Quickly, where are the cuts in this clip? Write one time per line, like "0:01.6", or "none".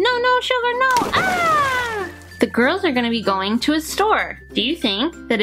0:02.2
0:04.4